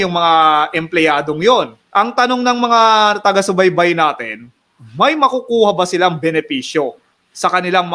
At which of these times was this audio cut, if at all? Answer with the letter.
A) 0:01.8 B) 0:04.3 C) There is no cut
A